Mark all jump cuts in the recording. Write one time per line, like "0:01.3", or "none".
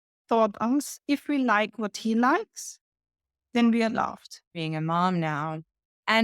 0:04.4